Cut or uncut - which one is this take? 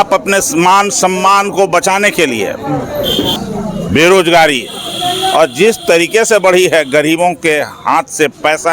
cut